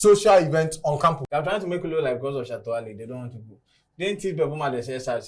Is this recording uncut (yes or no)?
no